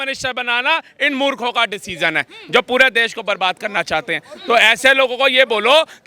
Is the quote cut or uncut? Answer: uncut